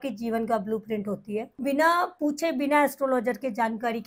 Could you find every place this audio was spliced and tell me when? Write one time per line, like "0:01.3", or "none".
0:01.6

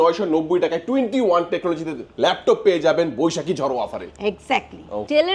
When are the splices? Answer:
none

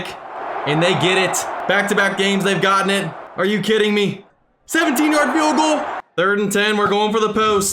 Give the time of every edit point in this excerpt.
0:01.5
0:03.2
0:04.3
0:06.0

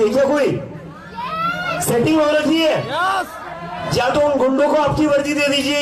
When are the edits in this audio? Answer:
0:03.8

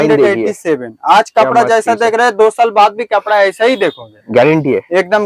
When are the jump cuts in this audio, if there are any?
none

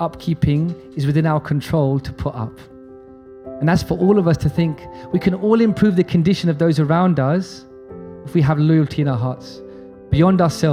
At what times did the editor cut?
none

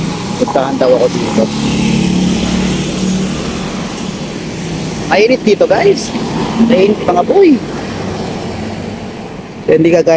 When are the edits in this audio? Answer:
none

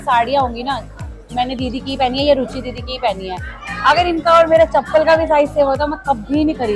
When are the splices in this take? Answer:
none

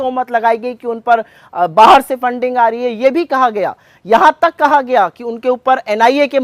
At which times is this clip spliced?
none

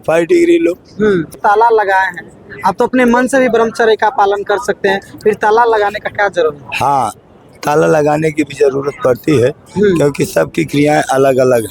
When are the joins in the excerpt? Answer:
0:01.4

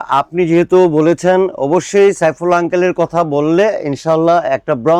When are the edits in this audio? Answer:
none

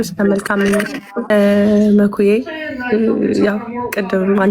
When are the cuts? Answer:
0:01.3

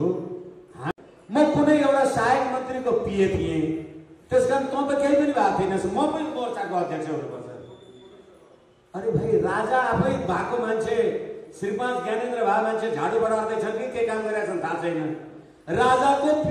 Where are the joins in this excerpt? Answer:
0:00.9

